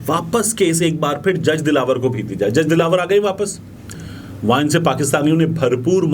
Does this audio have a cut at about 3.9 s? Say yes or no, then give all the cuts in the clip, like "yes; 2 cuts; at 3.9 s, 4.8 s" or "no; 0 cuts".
yes; 1 cut; at 3.9 s